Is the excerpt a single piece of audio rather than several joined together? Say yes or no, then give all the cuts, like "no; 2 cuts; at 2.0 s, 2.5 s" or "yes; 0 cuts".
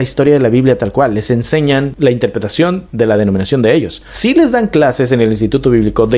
yes; 0 cuts